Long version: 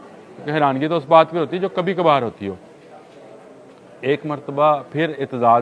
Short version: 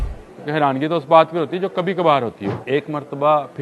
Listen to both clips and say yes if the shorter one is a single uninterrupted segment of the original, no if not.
no